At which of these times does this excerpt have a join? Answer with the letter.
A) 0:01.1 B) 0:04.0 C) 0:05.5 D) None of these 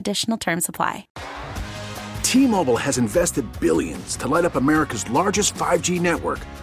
A